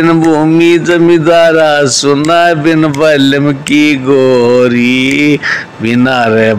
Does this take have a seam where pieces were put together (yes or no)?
no